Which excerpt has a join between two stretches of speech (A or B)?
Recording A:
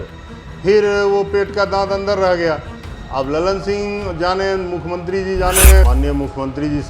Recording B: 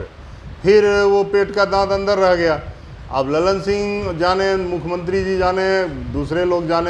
A